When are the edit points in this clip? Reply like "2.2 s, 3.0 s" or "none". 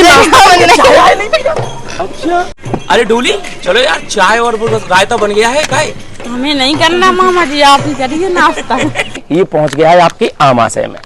9.2 s